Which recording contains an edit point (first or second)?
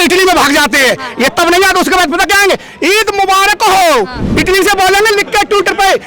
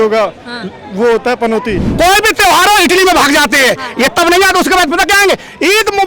second